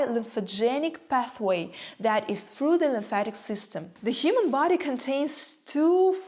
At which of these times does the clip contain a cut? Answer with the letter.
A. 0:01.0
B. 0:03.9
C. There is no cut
B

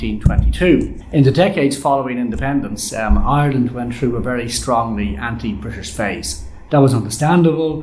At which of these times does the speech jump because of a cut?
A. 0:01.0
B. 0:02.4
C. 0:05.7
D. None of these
A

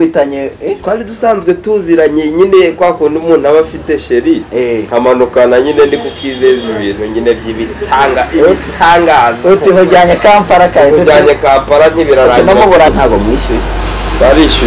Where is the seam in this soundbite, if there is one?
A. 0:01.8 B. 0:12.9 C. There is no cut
B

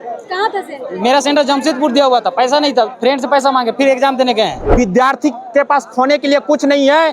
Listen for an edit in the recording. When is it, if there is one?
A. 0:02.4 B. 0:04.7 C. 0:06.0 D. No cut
B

